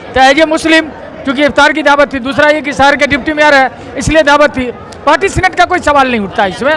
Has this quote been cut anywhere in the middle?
no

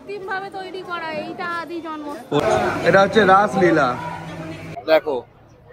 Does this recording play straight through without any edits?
no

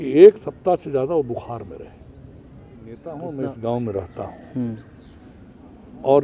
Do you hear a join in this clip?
yes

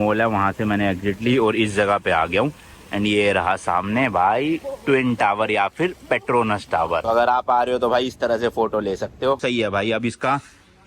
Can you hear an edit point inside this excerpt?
yes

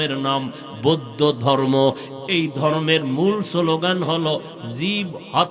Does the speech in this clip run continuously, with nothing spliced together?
yes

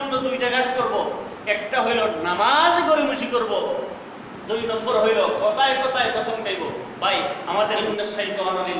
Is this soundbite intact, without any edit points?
no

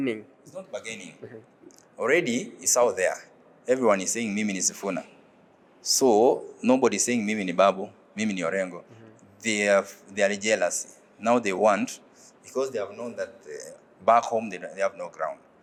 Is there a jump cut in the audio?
no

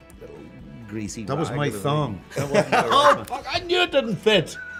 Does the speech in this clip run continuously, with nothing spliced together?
yes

